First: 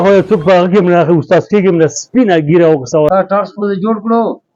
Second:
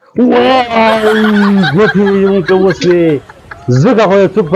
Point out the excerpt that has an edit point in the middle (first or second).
first